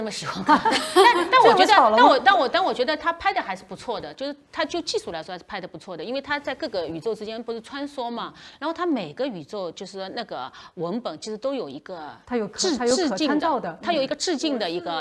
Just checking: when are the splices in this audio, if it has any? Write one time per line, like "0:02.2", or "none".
none